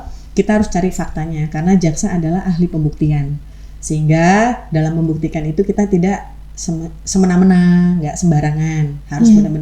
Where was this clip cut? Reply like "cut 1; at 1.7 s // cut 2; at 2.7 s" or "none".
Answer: none